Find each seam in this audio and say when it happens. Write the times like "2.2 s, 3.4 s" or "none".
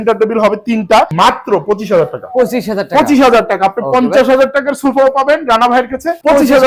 none